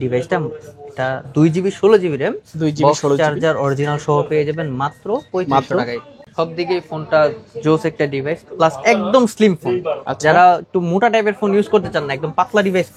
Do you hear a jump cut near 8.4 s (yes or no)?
no